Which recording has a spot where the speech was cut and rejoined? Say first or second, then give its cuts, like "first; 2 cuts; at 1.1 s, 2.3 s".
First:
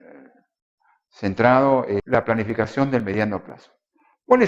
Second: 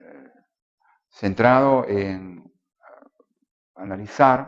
second; 1 cut; at 2.0 s